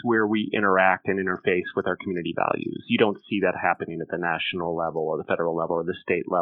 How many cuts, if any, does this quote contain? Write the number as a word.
zero